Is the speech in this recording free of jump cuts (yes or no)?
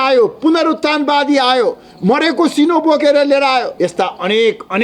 no